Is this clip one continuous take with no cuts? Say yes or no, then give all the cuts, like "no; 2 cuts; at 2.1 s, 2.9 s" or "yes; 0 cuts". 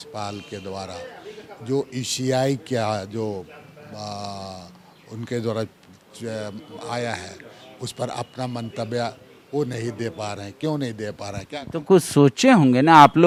yes; 0 cuts